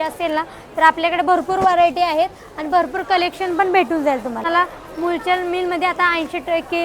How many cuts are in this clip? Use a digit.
1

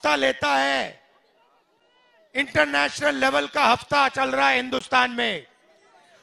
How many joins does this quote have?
0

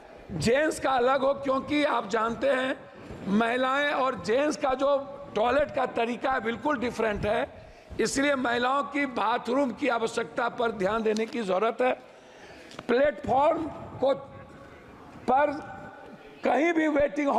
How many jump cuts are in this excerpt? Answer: 0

